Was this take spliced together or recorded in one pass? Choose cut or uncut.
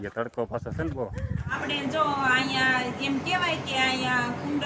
cut